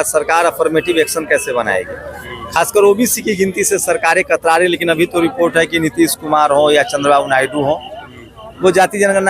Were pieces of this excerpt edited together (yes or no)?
no